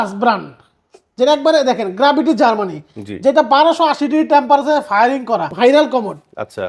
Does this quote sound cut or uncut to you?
cut